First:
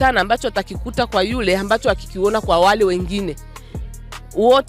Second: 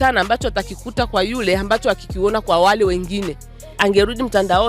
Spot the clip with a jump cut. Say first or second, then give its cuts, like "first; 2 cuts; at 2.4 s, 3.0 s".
second; 1 cut; at 3.8 s